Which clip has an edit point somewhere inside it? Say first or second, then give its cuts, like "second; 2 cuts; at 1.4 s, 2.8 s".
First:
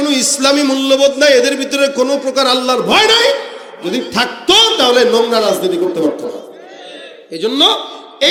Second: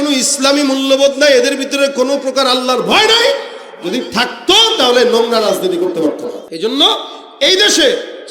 second; 1 cut; at 6.4 s